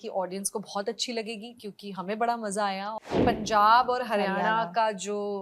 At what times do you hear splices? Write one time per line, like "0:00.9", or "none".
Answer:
0:03.0